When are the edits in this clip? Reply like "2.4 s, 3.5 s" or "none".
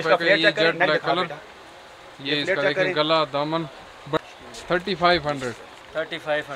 4.2 s